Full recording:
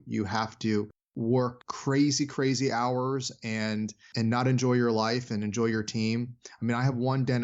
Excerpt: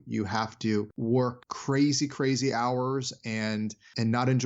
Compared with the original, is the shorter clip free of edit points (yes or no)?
no